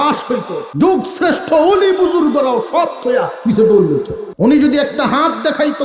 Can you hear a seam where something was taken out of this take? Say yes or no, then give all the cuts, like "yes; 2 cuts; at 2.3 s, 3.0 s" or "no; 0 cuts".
yes; 1 cut; at 4.2 s